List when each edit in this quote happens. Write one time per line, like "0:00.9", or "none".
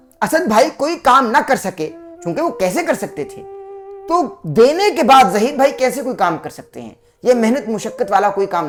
none